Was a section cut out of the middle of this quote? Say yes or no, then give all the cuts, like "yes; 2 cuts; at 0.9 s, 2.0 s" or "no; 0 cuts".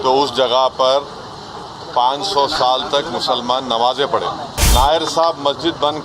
yes; 1 cut; at 4.5 s